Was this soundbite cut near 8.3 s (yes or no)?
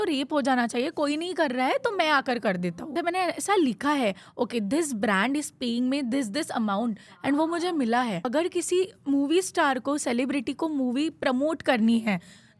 yes